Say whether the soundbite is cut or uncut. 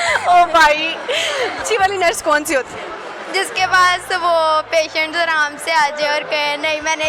cut